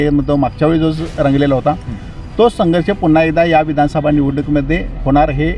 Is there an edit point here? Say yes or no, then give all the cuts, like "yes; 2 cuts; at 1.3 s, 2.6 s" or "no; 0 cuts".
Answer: no; 0 cuts